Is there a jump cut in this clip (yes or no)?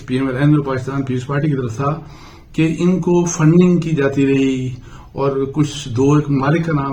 no